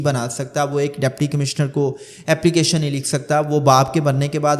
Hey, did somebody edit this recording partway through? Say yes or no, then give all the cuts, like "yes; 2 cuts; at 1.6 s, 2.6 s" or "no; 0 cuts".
no; 0 cuts